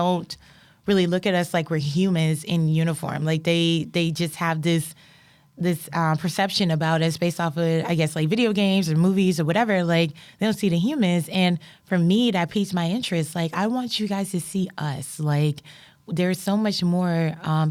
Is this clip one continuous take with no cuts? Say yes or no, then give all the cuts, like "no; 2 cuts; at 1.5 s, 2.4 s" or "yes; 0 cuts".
yes; 0 cuts